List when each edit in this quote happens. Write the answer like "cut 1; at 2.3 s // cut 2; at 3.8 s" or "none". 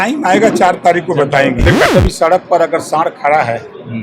cut 1; at 1.9 s

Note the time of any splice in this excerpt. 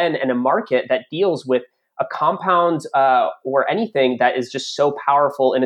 none

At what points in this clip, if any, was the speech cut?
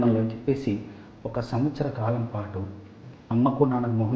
cut 1; at 3.1 s

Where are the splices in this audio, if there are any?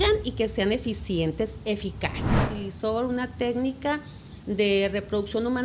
cut 1; at 2.6 s

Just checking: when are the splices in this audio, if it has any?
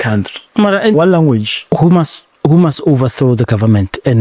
cut 1; at 0.9 s

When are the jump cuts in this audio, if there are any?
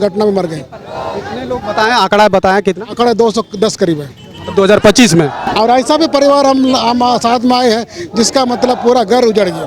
none

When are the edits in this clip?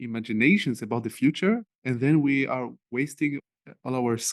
cut 1; at 3.4 s

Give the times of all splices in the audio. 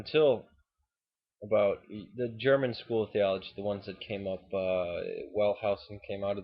cut 1; at 2.4 s

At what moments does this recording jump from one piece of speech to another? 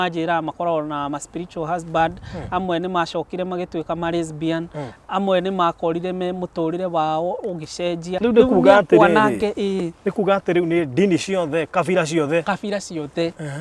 cut 1; at 8.1 s

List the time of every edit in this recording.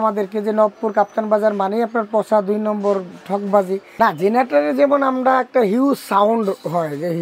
cut 1; at 3.9 s

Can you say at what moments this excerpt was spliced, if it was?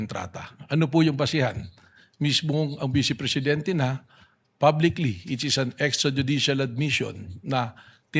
cut 1; at 2.2 s // cut 2; at 5.9 s

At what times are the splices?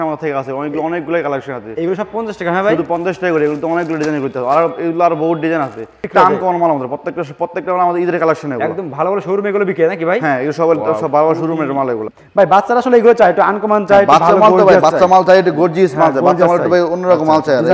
cut 1; at 6.1 s // cut 2; at 12.2 s

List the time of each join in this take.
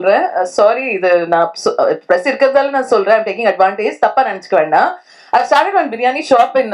none

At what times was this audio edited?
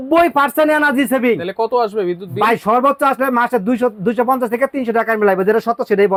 none

